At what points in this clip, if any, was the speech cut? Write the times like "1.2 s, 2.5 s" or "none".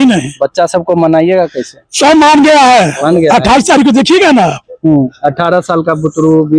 none